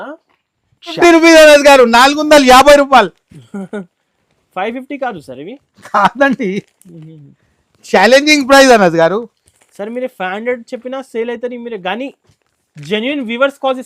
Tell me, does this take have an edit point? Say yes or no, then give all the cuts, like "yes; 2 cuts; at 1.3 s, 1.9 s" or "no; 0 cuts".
yes; 1 cut; at 1.0 s